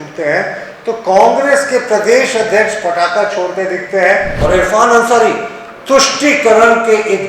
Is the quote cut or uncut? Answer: cut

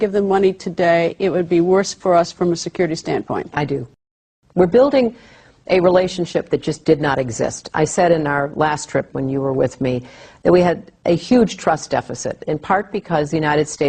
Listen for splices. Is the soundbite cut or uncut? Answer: cut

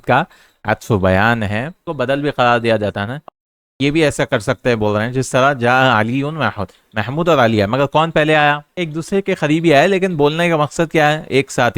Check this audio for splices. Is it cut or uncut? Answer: cut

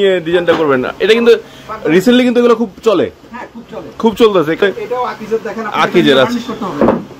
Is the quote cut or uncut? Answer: cut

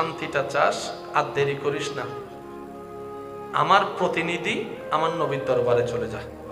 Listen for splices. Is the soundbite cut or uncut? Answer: uncut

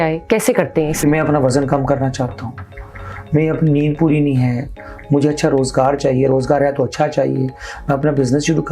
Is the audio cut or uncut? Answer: cut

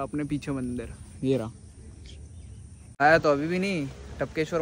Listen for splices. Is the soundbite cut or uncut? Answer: cut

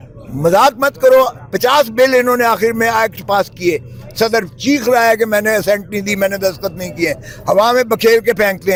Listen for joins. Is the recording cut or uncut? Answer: uncut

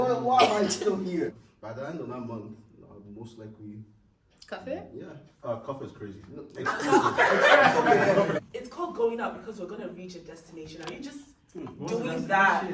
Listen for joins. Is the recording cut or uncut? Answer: cut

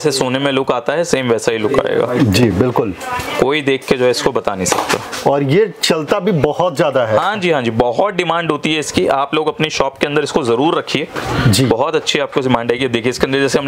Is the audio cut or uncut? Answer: uncut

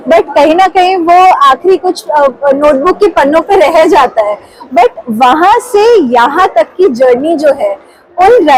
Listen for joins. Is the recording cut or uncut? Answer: uncut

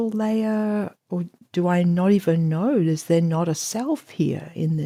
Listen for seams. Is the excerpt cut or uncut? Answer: uncut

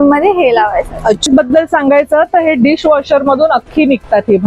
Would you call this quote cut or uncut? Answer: cut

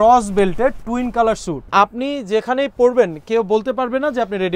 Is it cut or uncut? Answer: cut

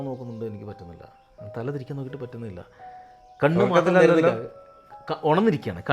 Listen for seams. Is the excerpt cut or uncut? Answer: uncut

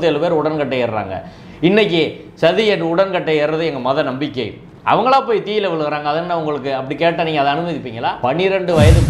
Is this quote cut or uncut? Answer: cut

